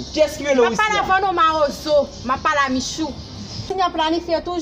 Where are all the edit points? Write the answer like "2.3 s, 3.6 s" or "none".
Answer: 3.6 s